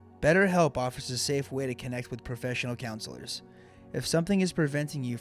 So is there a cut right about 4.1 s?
no; 0 cuts

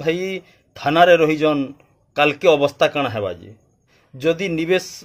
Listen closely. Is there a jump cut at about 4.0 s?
yes; 1 cut; at 4.0 s

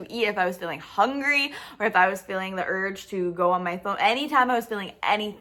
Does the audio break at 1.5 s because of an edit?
no; 0 cuts

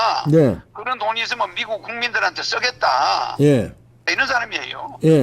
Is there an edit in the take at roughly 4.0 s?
yes; 1 cut; at 4.0 s

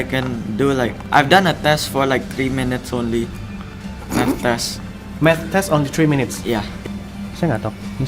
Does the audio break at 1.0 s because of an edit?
yes; 2 cuts; at 1.0 s, 6.7 s

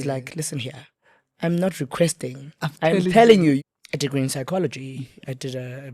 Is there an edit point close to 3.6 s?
yes; 1 cut; at 3.6 s

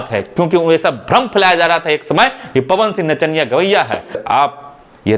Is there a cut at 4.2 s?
yes; 1 cut; at 4.2 s

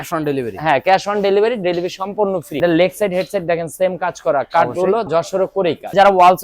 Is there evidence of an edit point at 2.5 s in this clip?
yes; 2 cuts; at 2.5 s, 5.4 s

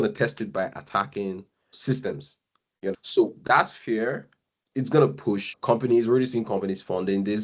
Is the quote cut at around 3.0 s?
yes; 2 cuts; at 3.0 s, 5.5 s

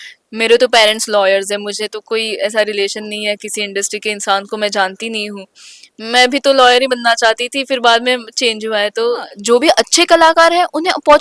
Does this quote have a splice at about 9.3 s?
yes; 1 cut; at 9.3 s

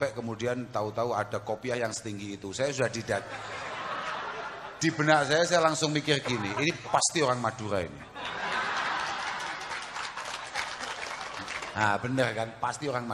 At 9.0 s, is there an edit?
no; 1 cut; at 11.6 s

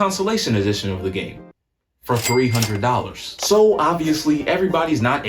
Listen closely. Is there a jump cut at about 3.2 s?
yes; 1 cut; at 3.2 s

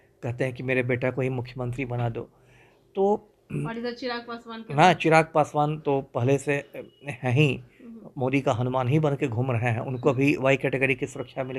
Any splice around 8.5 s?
no; 0 cuts

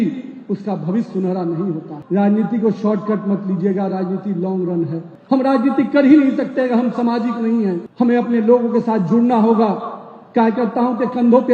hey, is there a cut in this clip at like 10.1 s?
no; 3 cuts; at 1.9 s, 5.1 s, 7.9 s

